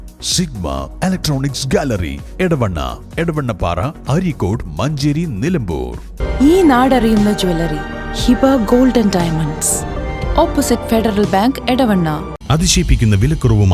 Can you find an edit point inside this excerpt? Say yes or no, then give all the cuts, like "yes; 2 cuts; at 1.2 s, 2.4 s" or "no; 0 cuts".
yes; 1 cut; at 12.3 s